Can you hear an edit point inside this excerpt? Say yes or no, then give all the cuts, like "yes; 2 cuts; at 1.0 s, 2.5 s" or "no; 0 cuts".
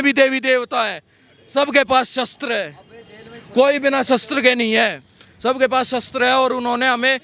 no; 0 cuts